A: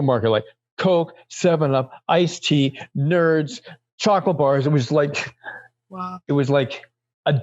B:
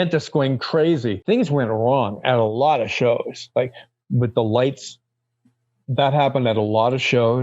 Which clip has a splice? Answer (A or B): B